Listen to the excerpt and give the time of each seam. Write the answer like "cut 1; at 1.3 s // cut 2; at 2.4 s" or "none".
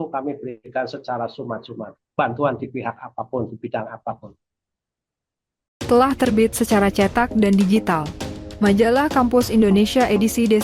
cut 1; at 5.8 s

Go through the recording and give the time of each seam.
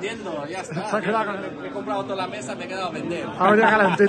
cut 1; at 1.3 s

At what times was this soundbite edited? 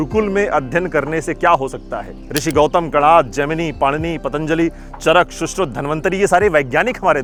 none

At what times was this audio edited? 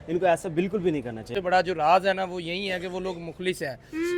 cut 1; at 1.3 s

